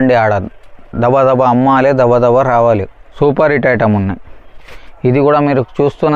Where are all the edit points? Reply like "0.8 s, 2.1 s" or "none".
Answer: 3.0 s